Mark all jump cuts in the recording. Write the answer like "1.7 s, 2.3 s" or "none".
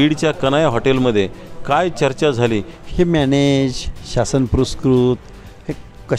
2.8 s